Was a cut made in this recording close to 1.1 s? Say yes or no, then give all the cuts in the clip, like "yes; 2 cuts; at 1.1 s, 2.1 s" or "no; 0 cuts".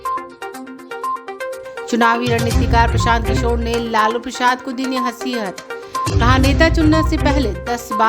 yes; 1 cut; at 1.1 s